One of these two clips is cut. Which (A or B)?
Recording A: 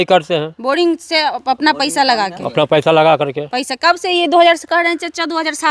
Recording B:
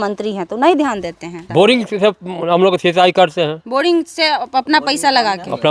B